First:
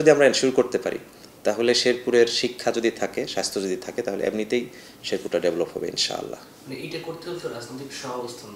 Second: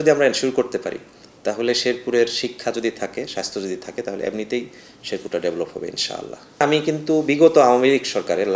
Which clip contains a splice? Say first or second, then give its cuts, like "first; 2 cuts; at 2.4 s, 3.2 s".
second; 1 cut; at 6.6 s